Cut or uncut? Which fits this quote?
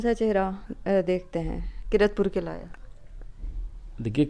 uncut